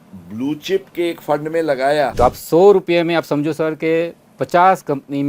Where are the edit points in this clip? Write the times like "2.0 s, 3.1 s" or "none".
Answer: 2.1 s

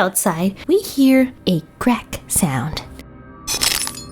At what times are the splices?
none

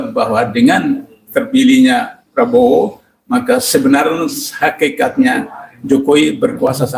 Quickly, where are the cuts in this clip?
none

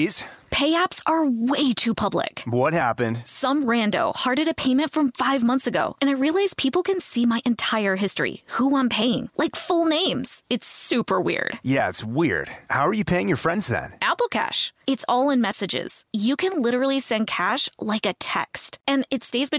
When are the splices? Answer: none

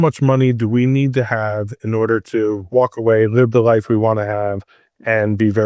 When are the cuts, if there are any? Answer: none

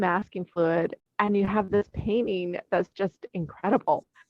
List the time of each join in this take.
1.0 s

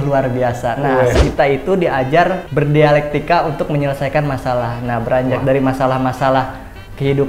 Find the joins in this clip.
1.2 s, 2.4 s

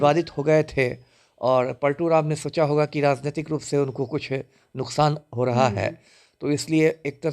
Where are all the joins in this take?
none

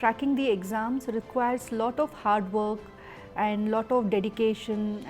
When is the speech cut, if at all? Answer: none

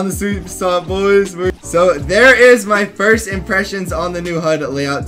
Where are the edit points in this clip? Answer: 1.6 s

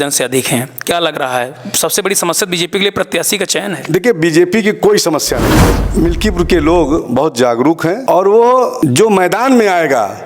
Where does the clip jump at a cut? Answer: 5.8 s, 8.0 s, 8.7 s

